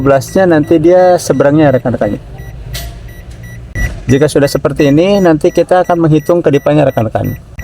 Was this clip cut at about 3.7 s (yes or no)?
yes